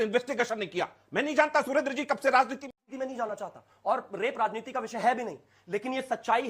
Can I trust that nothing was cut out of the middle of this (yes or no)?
no